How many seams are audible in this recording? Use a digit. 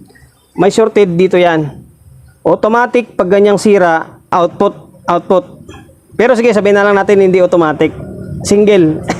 1